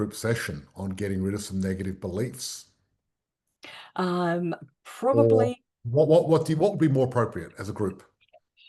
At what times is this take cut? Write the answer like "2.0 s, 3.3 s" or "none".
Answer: none